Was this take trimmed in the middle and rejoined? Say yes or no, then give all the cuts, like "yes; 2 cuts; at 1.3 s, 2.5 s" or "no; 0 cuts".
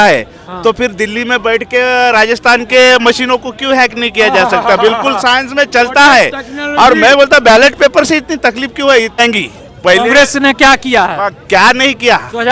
yes; 1 cut; at 9.2 s